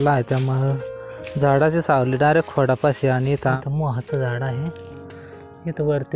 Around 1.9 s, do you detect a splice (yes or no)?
no